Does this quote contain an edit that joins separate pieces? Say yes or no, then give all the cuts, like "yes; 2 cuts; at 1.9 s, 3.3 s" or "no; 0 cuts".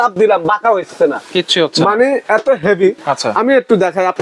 no; 0 cuts